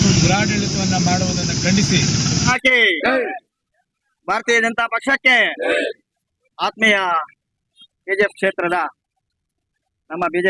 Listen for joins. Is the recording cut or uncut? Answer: cut